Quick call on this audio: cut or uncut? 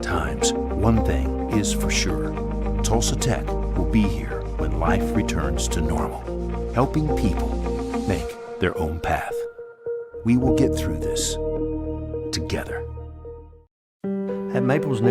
cut